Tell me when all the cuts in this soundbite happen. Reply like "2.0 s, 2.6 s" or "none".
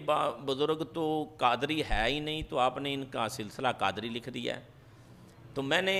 none